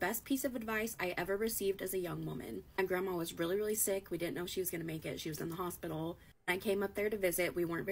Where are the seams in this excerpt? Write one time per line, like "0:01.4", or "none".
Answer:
0:01.0